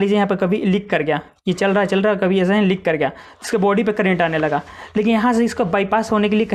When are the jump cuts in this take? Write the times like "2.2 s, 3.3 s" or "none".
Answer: none